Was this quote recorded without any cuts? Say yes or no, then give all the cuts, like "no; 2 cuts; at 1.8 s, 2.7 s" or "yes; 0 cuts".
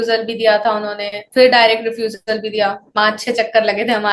yes; 0 cuts